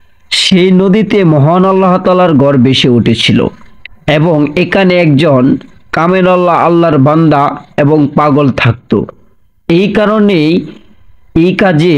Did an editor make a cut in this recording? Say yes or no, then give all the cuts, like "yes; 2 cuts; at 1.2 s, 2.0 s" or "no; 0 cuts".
no; 0 cuts